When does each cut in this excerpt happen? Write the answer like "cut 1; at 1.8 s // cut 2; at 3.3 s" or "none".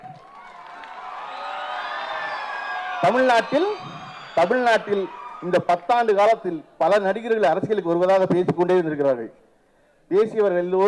none